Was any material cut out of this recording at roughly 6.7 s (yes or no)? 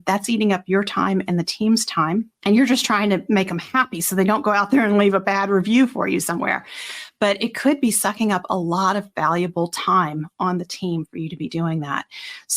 no